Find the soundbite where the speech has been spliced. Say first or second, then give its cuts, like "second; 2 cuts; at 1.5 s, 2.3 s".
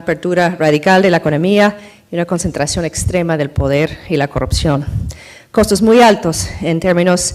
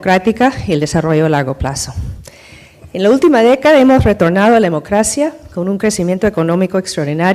first; 1 cut; at 4.5 s